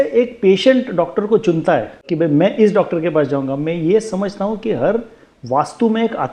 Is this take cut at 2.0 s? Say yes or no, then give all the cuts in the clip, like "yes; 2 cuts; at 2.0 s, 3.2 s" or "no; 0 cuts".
yes; 1 cut; at 2.0 s